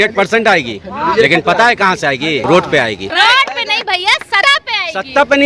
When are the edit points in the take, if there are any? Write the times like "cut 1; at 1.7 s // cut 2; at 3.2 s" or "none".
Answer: cut 1; at 2.4 s // cut 2; at 3.1 s // cut 3; at 4.4 s